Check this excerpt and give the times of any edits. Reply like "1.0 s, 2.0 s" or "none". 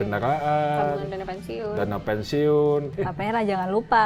3.0 s

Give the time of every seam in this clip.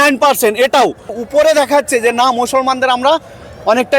1.1 s

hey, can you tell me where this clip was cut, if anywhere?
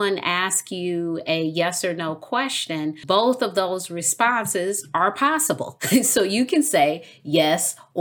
3.0 s, 5.7 s

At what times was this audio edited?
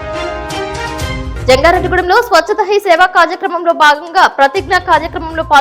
1.4 s

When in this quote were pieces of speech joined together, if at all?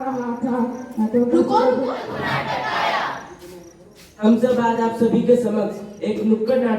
2.0 s

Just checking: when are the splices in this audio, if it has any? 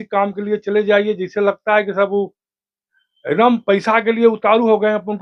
none

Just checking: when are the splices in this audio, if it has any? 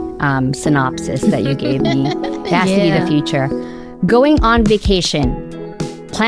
none

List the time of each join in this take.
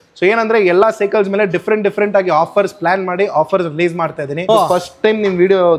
4.4 s

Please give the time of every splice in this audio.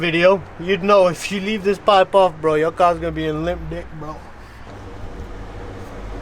4.7 s

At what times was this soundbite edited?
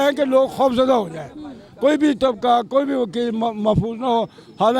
none

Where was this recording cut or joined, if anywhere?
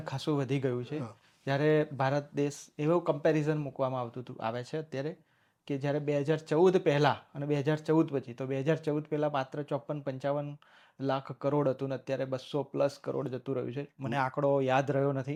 none

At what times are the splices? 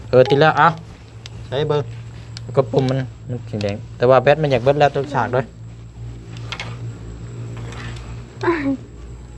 none

